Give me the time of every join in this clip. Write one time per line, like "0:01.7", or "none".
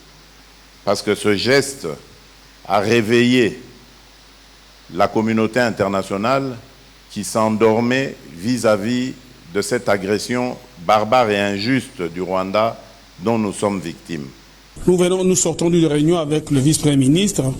0:14.7